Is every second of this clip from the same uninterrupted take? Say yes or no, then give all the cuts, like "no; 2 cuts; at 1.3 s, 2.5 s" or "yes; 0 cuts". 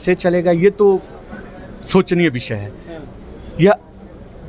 yes; 0 cuts